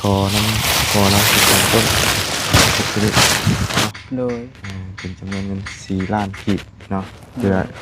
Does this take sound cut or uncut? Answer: cut